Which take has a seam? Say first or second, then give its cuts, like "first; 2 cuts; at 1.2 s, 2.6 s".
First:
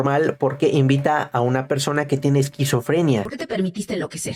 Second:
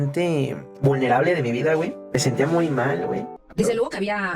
second; 1 cut; at 3.4 s